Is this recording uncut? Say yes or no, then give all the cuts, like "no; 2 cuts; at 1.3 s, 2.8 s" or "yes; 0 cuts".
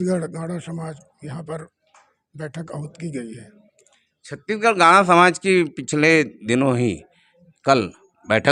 yes; 0 cuts